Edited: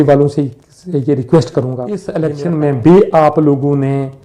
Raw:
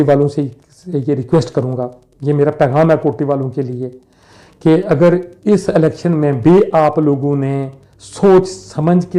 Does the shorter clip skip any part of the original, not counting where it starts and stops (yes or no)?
yes